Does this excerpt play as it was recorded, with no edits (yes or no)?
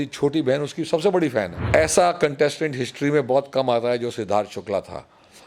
no